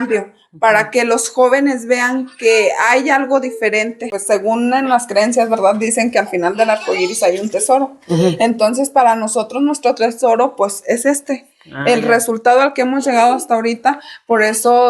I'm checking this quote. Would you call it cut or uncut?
cut